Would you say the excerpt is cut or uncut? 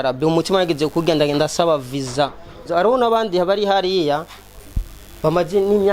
cut